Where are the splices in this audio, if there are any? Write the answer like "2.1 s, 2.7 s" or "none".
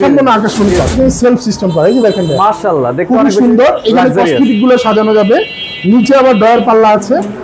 0.9 s